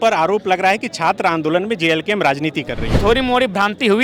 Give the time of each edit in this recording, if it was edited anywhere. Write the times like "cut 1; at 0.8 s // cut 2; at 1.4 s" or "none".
cut 1; at 2.8 s